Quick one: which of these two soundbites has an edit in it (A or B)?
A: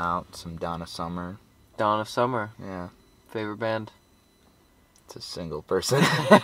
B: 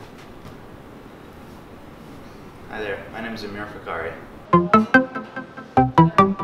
B